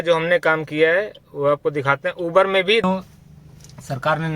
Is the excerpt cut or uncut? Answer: cut